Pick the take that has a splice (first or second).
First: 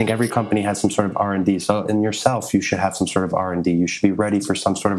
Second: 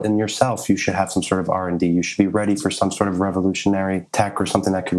second